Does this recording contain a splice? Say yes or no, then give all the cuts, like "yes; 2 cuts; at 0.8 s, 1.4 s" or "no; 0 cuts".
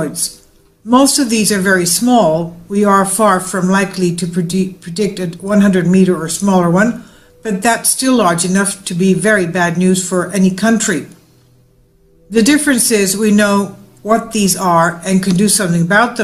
no; 0 cuts